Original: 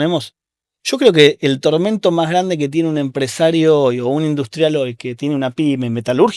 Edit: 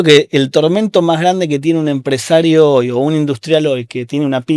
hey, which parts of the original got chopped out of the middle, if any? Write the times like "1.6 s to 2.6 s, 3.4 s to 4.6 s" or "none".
none